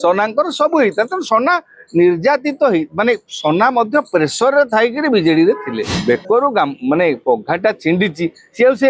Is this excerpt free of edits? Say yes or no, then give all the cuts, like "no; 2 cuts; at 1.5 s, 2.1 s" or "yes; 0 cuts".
no; 1 cut; at 5.9 s